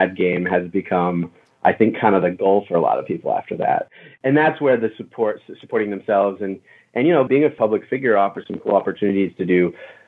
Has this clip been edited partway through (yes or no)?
yes